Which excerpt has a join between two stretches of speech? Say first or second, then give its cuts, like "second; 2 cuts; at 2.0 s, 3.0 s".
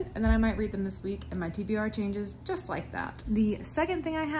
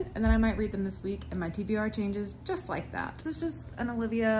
second; 1 cut; at 3.2 s